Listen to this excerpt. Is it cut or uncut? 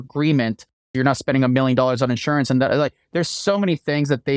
cut